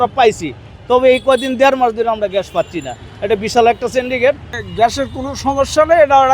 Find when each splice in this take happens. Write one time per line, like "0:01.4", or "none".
0:04.6